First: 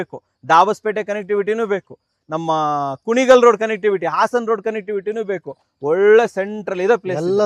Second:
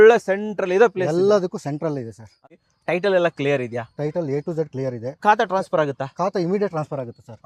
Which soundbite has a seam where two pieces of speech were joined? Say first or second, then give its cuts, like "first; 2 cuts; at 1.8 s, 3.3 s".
second; 1 cut; at 2.5 s